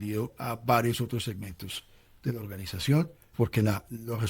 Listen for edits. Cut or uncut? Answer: cut